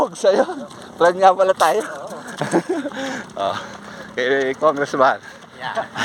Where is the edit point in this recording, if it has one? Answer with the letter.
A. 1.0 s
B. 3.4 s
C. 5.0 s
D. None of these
D